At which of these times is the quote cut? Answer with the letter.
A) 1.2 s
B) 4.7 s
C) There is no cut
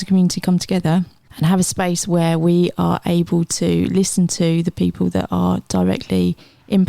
A